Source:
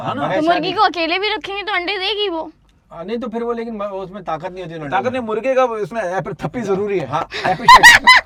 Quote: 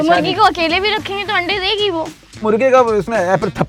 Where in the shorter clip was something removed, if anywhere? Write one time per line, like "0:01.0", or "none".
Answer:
0:02.4

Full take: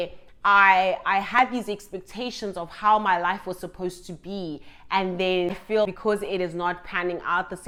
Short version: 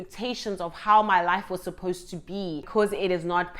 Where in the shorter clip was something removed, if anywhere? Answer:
0:02.7

